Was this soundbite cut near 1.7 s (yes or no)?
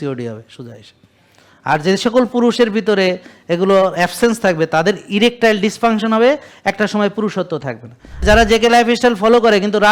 no